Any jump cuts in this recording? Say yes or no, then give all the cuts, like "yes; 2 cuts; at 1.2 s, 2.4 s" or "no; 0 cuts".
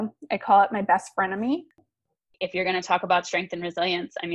yes; 1 cut; at 1.7 s